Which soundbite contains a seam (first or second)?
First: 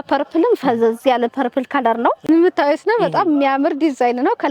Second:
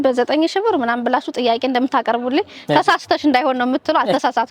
first